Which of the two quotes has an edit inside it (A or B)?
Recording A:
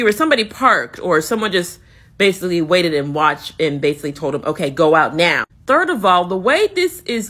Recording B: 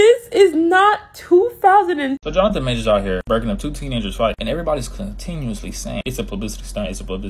B